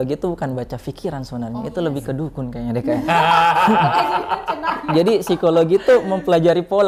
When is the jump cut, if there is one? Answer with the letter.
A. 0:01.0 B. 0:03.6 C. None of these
C